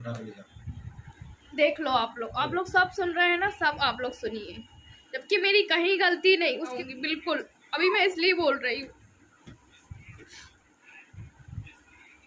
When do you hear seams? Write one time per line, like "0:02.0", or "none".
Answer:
0:06.8

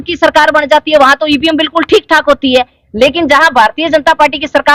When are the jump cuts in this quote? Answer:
none

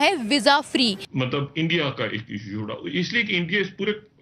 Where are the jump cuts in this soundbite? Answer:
0:01.1

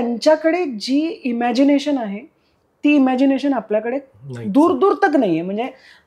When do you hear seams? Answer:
none

